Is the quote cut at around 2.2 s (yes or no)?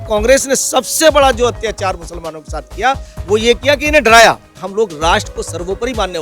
no